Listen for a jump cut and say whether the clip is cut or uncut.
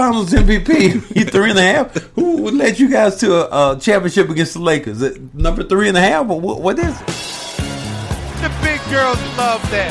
cut